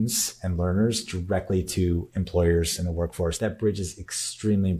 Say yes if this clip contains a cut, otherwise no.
yes